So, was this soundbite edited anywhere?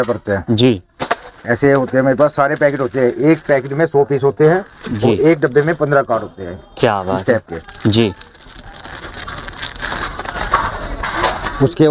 no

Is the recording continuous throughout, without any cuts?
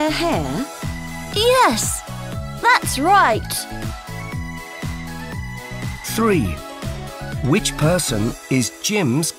yes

